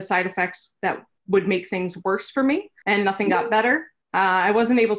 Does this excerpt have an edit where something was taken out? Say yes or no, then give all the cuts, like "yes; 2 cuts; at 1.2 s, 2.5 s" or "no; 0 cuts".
yes; 3 cuts; at 1.1 s, 2.7 s, 4.0 s